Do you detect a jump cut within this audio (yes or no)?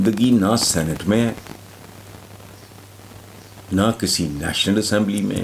no